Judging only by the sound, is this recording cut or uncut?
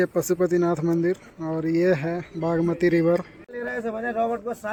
uncut